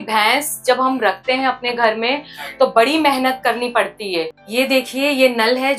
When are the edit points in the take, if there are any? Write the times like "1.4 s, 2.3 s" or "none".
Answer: 4.4 s